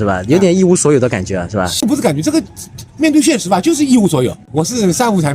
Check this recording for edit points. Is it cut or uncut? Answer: cut